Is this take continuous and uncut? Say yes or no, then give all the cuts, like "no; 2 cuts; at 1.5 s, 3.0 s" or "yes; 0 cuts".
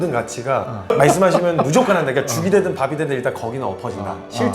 no; 1 cut; at 0.9 s